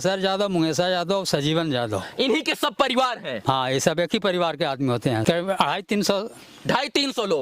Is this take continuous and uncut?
no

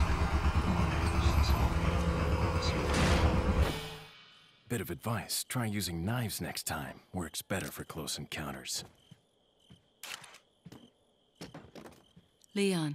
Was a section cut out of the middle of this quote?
yes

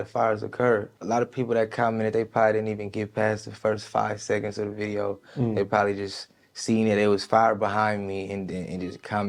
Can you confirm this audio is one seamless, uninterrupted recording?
yes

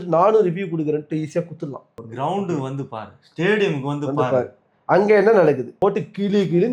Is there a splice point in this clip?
yes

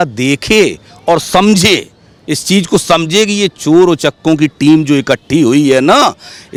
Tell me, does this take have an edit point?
no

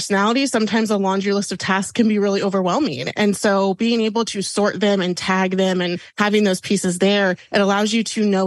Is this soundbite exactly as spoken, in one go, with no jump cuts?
no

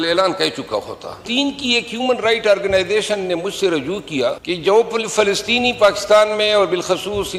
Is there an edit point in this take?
yes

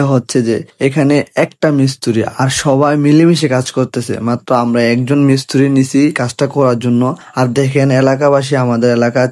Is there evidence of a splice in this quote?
no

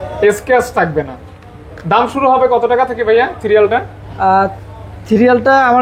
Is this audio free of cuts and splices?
yes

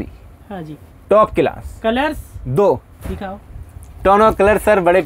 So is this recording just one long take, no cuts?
yes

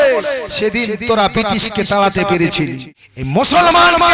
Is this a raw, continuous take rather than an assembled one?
no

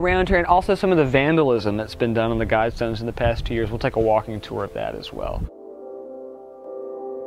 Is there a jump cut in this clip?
no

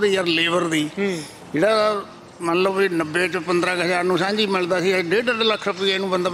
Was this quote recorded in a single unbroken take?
yes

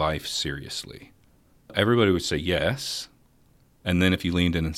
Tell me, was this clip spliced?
yes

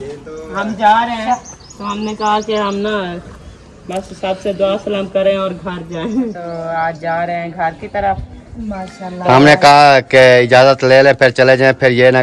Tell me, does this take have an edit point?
yes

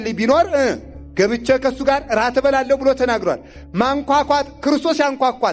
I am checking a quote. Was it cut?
no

